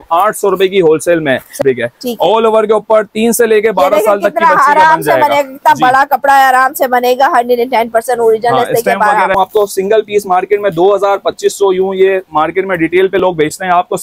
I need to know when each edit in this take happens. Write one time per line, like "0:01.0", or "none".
0:01.6
0:09.4